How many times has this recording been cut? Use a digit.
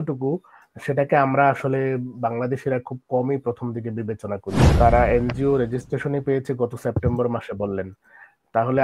1